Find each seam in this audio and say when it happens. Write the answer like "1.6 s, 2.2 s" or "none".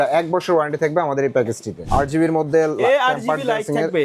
1.8 s